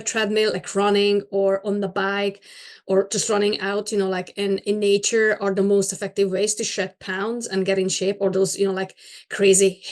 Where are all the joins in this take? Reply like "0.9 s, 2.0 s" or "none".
none